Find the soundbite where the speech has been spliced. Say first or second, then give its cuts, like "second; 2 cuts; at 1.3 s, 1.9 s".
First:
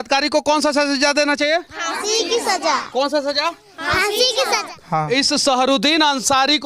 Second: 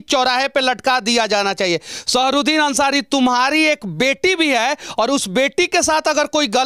first; 1 cut; at 4.7 s